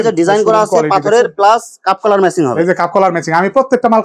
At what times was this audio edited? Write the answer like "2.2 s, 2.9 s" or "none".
none

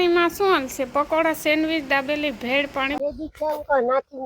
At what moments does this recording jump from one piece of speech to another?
3.0 s

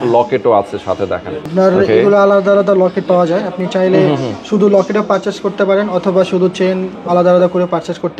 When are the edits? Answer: none

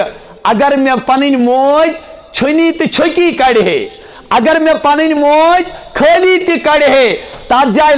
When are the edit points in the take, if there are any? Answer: none

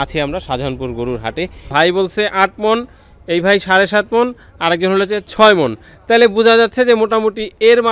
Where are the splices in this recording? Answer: 1.7 s

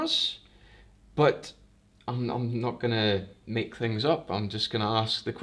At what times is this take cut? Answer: none

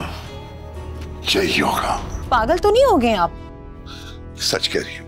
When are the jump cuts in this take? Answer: 2.1 s

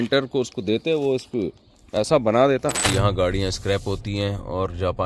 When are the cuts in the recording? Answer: 2.8 s

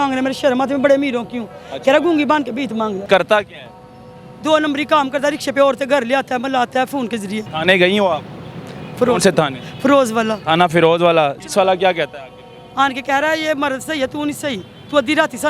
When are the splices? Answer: 3.0 s, 7.5 s, 11.4 s

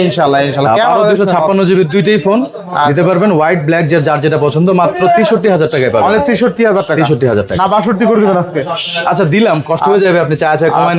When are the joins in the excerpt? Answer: none

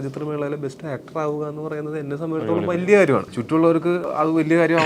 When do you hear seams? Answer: 3.9 s

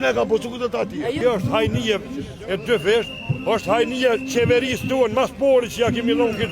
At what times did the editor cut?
1.2 s

